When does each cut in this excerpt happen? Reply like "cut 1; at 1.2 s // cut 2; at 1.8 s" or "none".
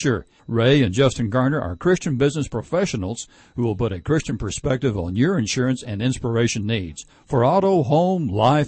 none